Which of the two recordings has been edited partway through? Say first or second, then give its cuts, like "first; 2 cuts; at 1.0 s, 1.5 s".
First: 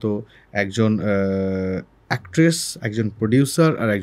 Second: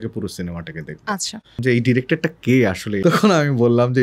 second; 2 cuts; at 1.6 s, 2.9 s